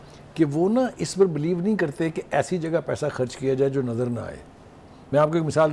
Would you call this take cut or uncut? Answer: uncut